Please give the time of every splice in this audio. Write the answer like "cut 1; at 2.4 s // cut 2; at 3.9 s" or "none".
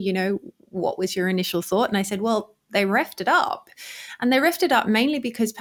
none